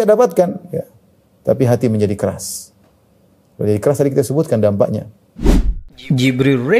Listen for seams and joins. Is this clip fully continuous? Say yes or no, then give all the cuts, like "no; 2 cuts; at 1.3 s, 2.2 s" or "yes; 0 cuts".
no; 1 cut; at 5.2 s